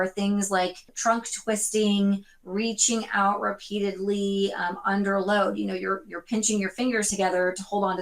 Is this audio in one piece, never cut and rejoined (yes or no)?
no